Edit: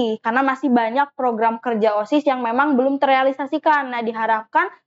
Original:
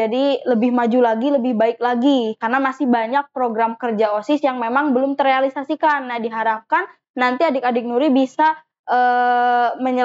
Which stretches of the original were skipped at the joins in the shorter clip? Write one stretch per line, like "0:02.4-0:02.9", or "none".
none